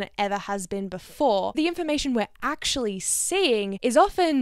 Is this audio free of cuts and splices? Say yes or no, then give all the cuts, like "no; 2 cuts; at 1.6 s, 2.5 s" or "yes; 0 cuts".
no; 1 cut; at 1.5 s